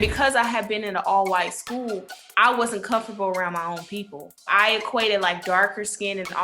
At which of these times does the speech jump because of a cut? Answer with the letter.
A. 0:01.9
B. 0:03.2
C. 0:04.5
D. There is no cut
C